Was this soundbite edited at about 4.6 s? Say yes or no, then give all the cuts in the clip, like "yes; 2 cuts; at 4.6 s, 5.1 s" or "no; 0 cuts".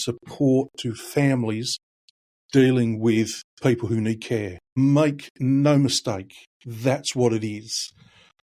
yes; 2 cuts; at 3.4 s, 4.6 s